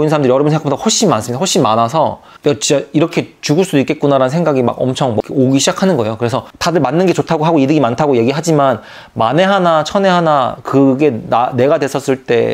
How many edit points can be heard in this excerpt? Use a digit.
2